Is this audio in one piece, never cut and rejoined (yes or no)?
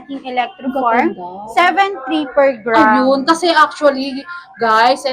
yes